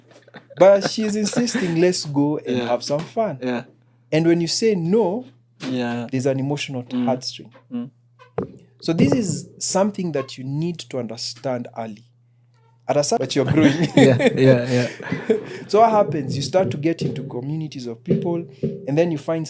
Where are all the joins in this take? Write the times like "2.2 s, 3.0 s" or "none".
13.2 s